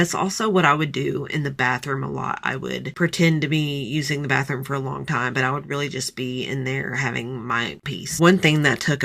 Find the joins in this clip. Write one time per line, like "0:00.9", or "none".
0:08.1